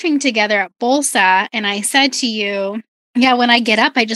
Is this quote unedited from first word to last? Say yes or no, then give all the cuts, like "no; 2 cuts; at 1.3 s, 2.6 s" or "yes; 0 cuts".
no; 1 cut; at 2.9 s